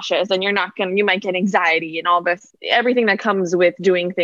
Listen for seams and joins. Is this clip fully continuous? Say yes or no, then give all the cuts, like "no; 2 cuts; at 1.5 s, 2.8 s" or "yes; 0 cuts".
no; 1 cut; at 2.5 s